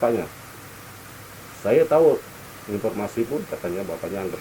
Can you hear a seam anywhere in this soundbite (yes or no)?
no